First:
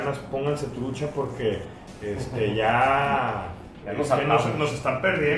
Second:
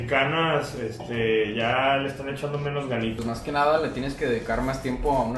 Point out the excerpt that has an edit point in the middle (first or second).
second